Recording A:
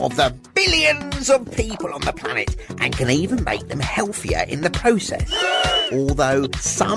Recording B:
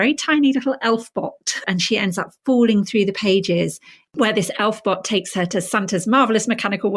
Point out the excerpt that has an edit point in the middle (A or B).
B